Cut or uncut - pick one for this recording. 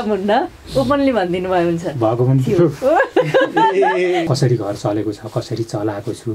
cut